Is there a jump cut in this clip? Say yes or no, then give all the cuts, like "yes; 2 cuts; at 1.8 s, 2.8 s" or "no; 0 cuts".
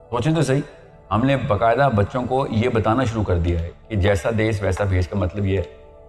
no; 0 cuts